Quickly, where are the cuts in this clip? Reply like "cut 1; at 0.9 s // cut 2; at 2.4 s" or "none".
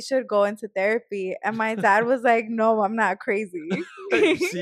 none

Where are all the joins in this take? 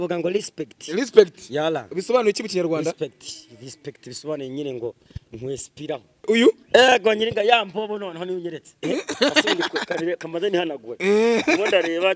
cut 1; at 6.2 s

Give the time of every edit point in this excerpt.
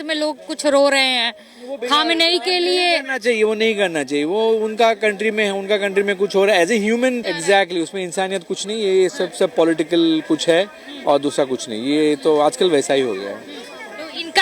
cut 1; at 7.3 s

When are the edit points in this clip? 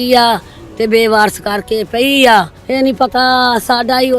cut 1; at 2.6 s

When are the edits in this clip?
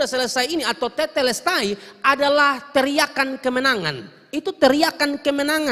none

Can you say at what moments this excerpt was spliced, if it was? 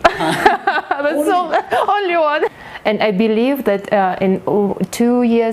cut 1; at 2.5 s

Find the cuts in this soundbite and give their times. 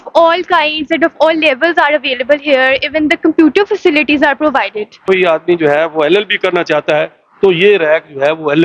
cut 1; at 5.0 s

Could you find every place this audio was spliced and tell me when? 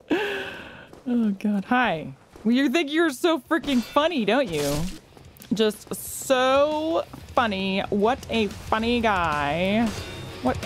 cut 1; at 5.0 s

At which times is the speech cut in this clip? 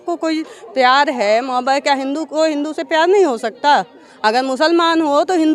none

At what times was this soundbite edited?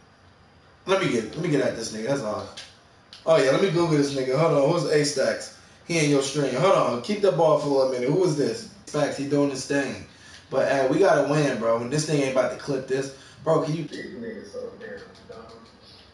cut 1; at 8.9 s // cut 2; at 13.9 s

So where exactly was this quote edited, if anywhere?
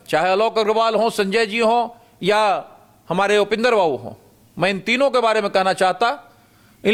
none

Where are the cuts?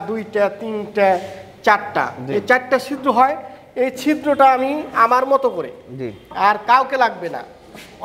none

